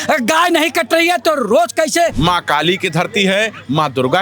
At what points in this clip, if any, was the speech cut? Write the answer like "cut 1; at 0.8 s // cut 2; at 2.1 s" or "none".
cut 1; at 2.2 s